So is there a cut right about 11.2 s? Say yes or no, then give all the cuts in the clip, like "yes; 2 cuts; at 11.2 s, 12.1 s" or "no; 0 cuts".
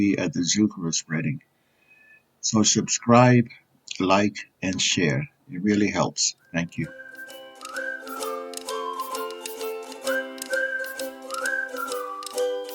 no; 1 cut; at 7.2 s